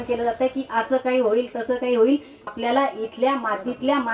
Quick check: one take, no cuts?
no; 1 cut; at 2.4 s

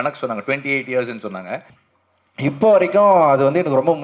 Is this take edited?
yes; 1 cut; at 1.8 s

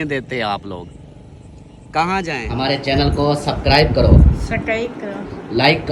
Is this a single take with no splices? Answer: no; 1 cut; at 2.4 s

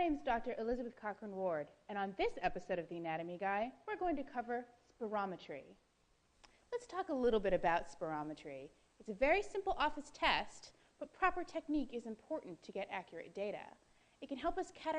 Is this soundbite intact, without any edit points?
no; 1 cut; at 6.8 s

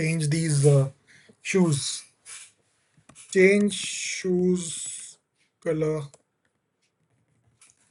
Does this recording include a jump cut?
no; 0 cuts

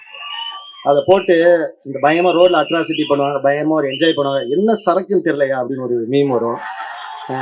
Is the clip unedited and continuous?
yes; 0 cuts

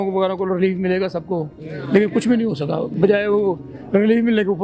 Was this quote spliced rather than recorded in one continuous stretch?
no; 0 cuts

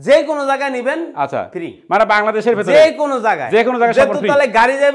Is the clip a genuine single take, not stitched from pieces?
yes; 0 cuts

